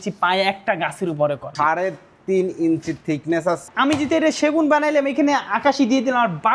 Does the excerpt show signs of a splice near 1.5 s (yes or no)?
yes